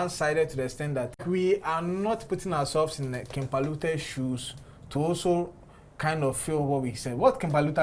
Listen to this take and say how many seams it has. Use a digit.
1